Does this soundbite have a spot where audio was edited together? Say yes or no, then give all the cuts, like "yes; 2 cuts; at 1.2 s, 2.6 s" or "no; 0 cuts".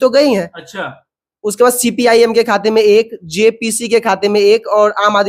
no; 0 cuts